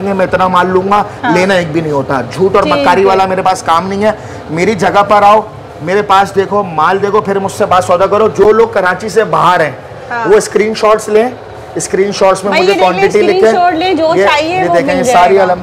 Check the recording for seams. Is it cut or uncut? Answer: uncut